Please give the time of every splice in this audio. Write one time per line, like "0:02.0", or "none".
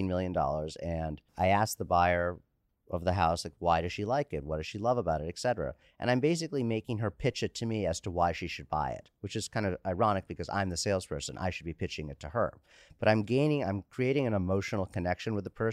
0:01.2